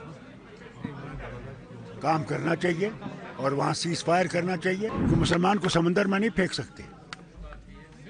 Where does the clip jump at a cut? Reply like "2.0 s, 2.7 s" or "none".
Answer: 5.0 s